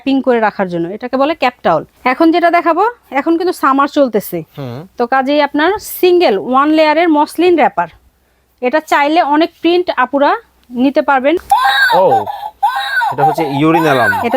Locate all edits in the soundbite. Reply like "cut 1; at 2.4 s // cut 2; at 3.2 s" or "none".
cut 1; at 1.9 s // cut 2; at 11.4 s